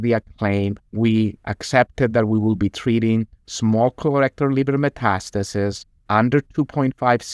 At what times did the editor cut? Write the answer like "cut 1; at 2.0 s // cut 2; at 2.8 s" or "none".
none